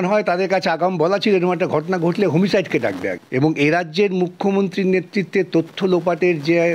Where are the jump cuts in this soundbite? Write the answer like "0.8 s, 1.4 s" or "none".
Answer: 3.2 s